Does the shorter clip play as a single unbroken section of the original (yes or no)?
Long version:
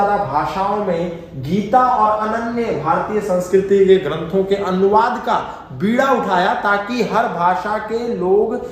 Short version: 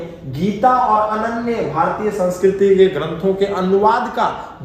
yes